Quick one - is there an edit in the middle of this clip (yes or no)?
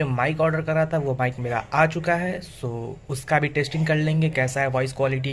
no